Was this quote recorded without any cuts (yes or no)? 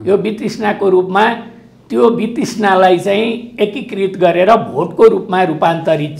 yes